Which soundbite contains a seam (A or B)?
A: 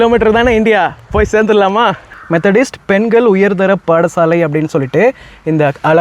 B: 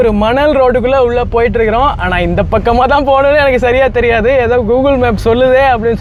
A